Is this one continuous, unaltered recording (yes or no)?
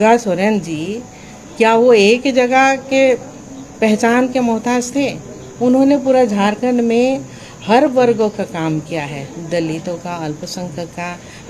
yes